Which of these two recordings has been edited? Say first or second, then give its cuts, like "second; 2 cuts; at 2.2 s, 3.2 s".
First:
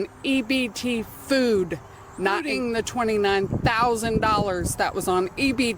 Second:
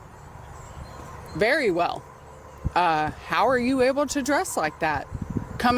first; 1 cut; at 2.5 s